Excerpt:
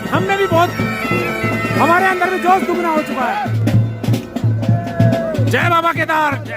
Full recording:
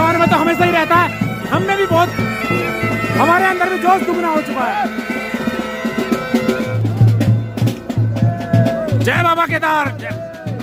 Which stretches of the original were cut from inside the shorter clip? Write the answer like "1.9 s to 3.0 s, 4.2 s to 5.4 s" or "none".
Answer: 5.0 s to 7.1 s